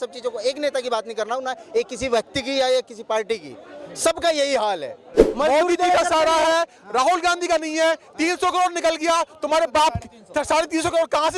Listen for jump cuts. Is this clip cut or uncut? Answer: cut